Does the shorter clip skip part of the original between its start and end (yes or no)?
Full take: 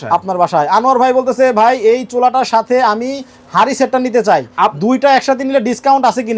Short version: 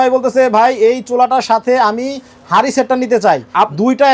no